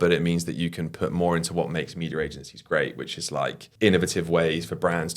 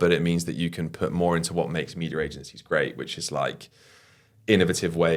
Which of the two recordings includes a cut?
first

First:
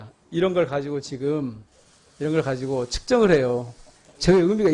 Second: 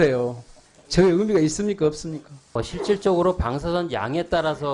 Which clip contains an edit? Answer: second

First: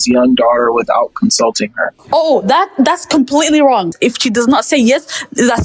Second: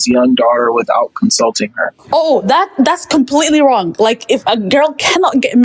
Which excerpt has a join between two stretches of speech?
first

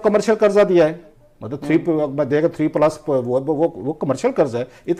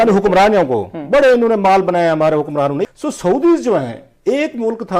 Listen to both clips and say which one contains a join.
second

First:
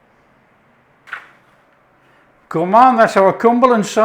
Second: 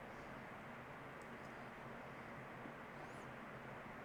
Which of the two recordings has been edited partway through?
first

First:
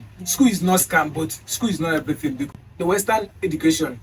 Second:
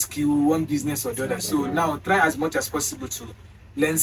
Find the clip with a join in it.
first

